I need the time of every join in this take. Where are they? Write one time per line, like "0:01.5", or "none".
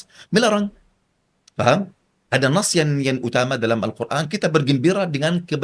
none